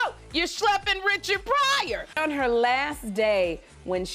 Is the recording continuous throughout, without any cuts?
no; 1 cut; at 2.0 s

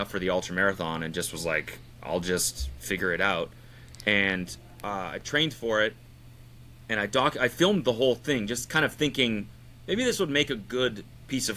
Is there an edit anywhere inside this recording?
no; 0 cuts

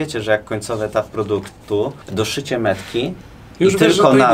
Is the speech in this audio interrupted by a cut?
no; 0 cuts

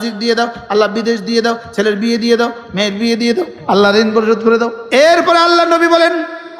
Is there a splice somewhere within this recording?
yes; 2 cuts; at 3.6 s, 4.8 s

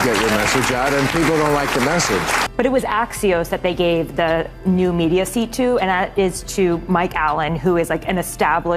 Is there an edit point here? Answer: yes; 1 cut; at 2.4 s

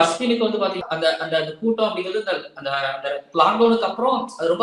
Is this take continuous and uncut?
yes; 0 cuts

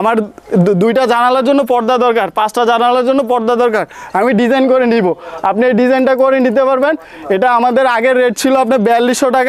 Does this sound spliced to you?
no; 0 cuts

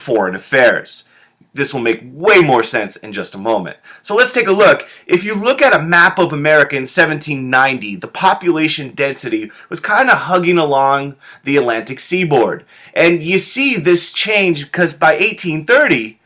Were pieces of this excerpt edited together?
yes; 1 cut; at 2.3 s

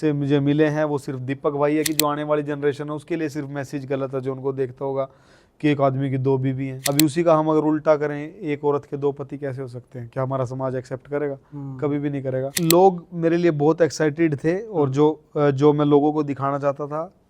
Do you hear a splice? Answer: yes; 3 cuts; at 1.9 s, 6.7 s, 12.5 s

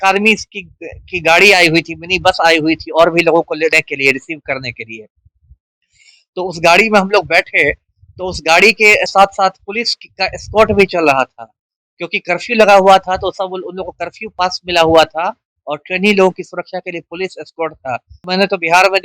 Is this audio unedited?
no; 1 cut; at 18.1 s

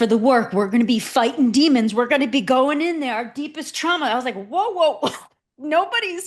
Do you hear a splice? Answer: no; 0 cuts

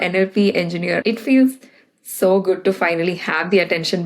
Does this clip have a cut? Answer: yes; 1 cut; at 1.0 s

